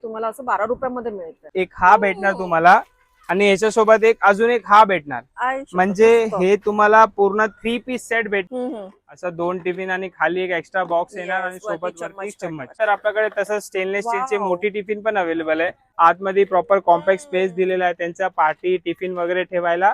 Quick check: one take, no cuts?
no; 4 cuts; at 1.4 s, 8.5 s, 12.8 s, 15.8 s

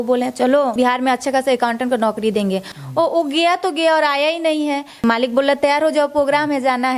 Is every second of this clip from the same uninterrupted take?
no; 3 cuts; at 0.7 s, 2.7 s, 5.0 s

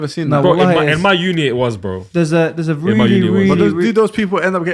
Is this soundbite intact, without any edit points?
yes; 0 cuts

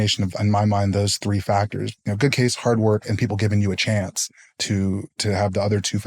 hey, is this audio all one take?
no; 1 cut; at 2.0 s

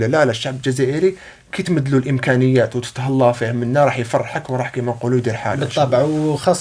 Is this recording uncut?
yes; 0 cuts

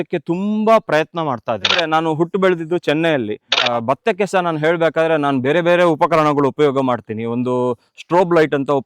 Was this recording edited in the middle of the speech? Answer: yes; 2 cuts; at 1.8 s, 3.6 s

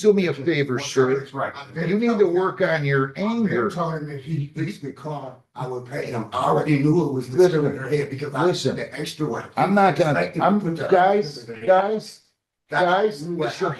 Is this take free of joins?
yes; 0 cuts

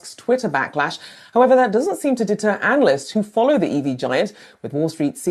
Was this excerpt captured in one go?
yes; 0 cuts

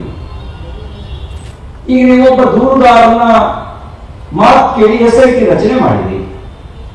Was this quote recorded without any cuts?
no; 1 cut; at 1.5 s

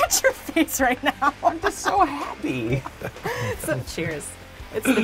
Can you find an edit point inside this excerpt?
no; 0 cuts

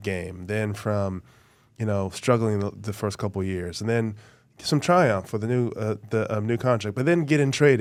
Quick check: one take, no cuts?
yes; 0 cuts

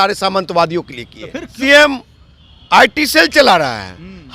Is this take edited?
yes; 1 cut; at 1.5 s

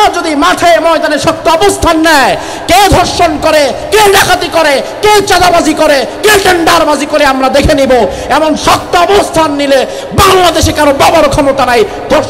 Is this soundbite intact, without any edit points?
yes; 0 cuts

